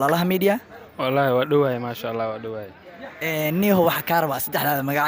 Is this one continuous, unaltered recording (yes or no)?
yes